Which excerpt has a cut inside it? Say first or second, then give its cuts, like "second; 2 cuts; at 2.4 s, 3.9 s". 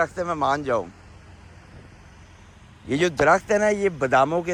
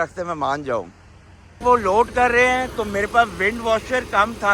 second; 1 cut; at 1.4 s